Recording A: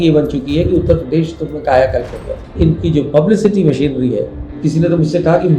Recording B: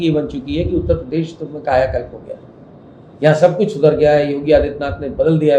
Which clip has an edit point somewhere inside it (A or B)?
A